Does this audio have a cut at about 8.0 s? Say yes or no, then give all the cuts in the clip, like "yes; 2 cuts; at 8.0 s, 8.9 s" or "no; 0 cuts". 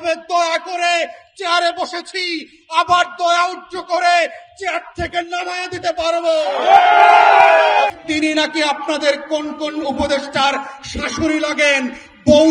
yes; 1 cut; at 8.0 s